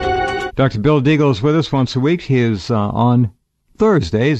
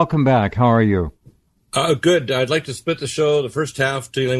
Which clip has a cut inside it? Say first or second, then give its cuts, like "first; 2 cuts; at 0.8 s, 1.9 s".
second; 1 cut; at 2.1 s